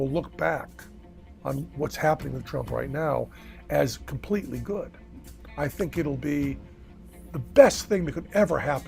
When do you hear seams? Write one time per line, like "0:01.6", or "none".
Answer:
0:01.7